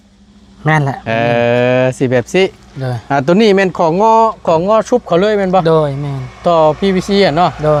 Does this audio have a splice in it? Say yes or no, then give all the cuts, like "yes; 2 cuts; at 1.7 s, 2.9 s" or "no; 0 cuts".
no; 0 cuts